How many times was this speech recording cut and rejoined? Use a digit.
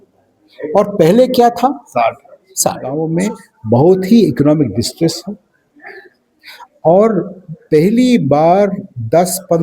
1